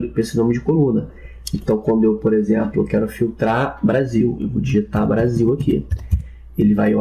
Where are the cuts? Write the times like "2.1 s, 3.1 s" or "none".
1.8 s